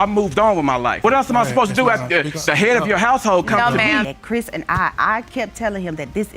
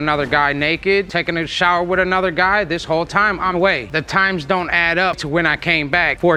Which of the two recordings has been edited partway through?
first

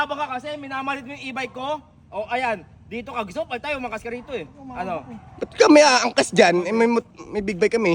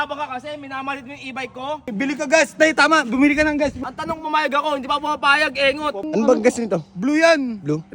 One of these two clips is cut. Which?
second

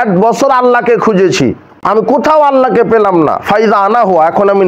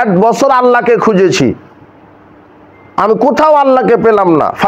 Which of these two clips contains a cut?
first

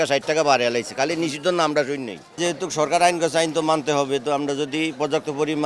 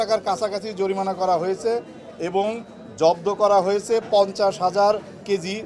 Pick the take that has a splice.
first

